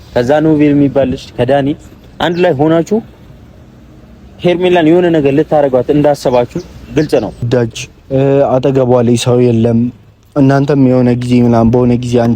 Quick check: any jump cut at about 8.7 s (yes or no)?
no